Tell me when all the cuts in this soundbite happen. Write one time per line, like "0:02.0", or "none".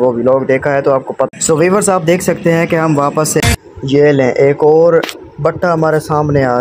0:01.3
0:03.4